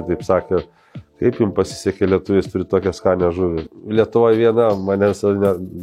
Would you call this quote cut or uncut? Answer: cut